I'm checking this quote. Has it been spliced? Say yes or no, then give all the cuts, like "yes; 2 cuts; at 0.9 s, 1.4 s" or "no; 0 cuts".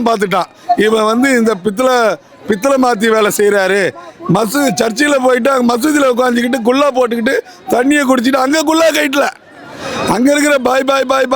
no; 0 cuts